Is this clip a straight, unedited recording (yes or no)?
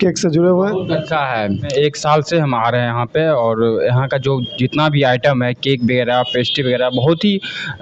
no